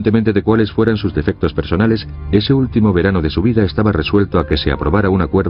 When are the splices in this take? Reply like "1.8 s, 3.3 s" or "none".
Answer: 3.4 s